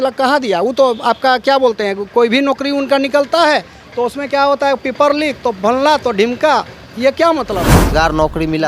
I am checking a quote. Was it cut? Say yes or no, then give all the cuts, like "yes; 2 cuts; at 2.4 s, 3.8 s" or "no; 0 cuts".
yes; 1 cut; at 7.8 s